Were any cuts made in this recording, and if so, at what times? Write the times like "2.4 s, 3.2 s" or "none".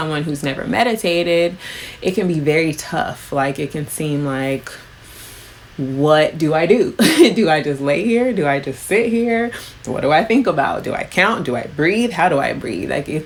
none